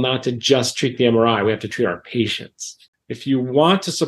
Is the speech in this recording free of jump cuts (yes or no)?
no